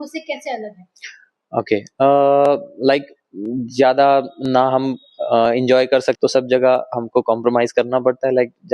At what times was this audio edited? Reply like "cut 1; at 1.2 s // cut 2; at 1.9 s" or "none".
cut 1; at 6.2 s

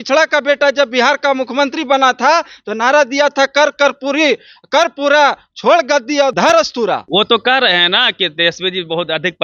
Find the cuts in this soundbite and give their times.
cut 1; at 6.3 s // cut 2; at 7.0 s

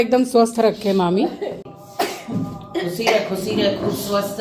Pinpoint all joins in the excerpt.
cut 1; at 1.8 s

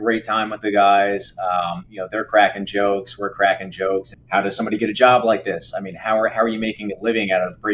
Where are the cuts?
cut 1; at 4.2 s

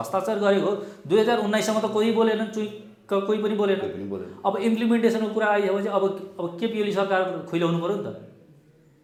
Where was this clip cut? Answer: none

